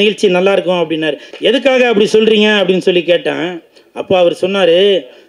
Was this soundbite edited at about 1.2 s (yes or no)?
yes